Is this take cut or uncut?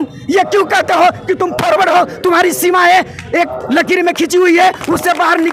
uncut